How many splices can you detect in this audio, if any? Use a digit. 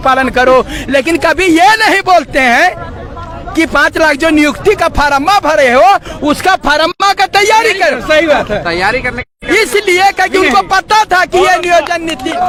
0